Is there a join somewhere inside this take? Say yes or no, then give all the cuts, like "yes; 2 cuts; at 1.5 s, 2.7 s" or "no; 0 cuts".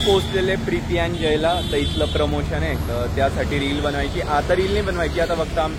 no; 0 cuts